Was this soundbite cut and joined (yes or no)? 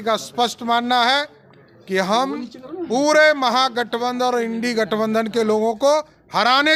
no